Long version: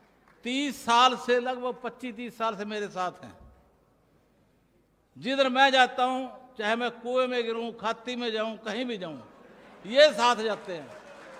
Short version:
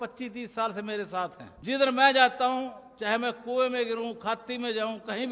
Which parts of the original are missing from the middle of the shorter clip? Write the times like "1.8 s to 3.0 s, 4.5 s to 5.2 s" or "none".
3.3 s to 5.1 s